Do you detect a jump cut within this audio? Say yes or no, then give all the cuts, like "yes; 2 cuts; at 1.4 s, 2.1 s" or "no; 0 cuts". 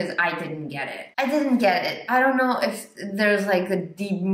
yes; 1 cut; at 1.0 s